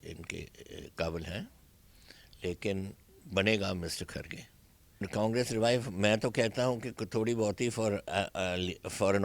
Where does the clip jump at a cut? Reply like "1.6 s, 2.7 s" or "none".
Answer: 5.1 s